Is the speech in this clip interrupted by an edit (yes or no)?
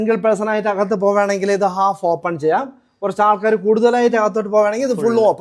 no